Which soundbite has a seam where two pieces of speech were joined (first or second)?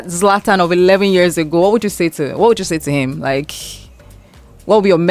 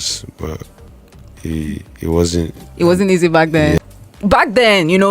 second